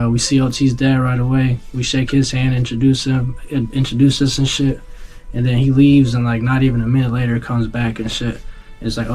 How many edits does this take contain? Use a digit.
0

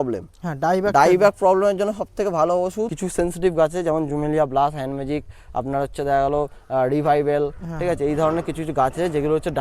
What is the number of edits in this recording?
1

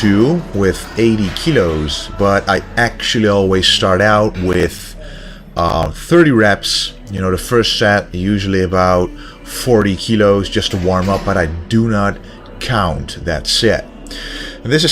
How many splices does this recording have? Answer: 1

